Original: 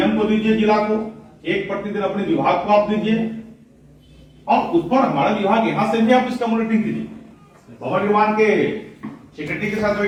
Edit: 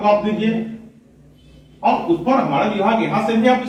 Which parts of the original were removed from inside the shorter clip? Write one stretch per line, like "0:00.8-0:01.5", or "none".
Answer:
none